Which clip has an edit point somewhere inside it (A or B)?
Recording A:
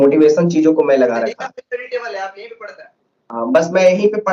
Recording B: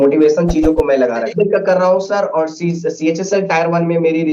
B